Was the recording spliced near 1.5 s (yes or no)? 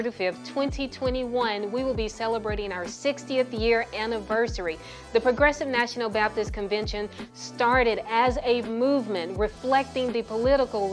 yes